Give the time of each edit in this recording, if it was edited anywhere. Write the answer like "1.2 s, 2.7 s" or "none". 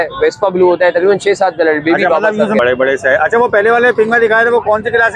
2.6 s

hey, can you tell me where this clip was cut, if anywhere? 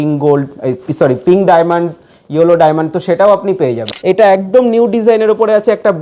3.8 s

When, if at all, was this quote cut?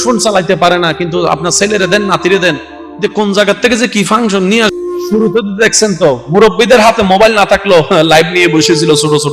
4.8 s

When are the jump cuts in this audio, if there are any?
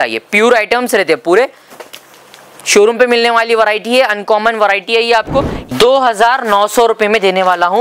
5.6 s

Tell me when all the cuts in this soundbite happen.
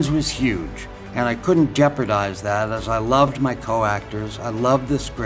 none

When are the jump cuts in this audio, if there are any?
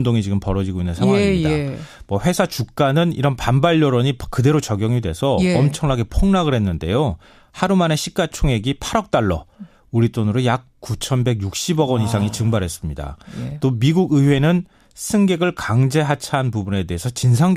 8.0 s

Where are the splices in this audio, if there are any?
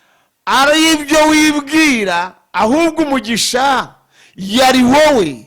none

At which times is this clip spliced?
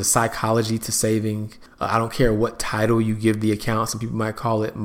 none

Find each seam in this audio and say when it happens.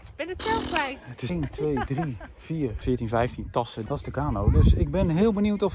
1.3 s, 2.8 s, 3.8 s

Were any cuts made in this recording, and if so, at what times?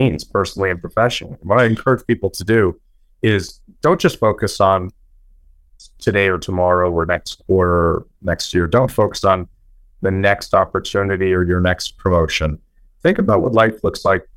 none

